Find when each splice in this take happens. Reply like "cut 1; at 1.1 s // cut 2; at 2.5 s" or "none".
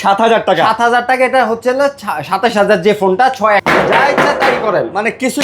cut 1; at 3.6 s